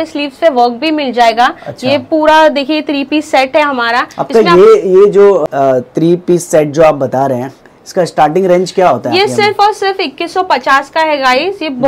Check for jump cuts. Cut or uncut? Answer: uncut